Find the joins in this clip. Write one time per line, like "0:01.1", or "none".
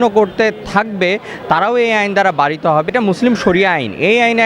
0:02.9

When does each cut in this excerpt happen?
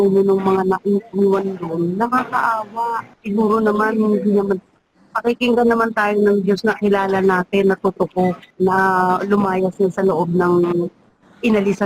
0:03.1
0:08.5

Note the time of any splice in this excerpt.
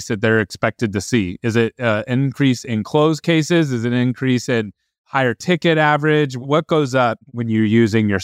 0:06.4
0:07.3

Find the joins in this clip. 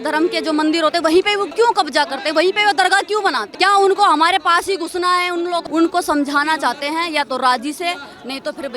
0:01.5
0:03.5
0:05.6

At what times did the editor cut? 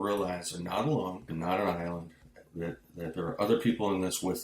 0:01.3

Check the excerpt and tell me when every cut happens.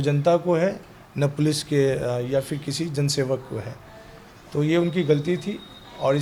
none

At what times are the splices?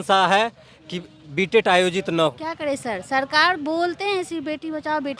0:02.4

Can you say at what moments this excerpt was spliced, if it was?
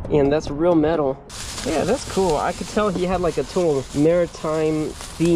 0:01.3
0:03.9

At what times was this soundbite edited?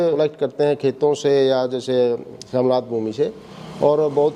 none

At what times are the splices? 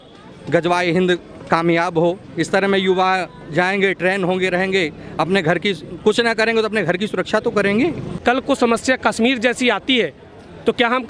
0:08.2

